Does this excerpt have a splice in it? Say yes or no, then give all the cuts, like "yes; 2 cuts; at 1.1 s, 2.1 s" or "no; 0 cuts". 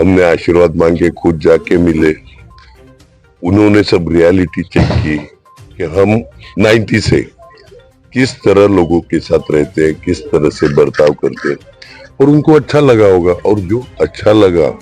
yes; 1 cut; at 6.5 s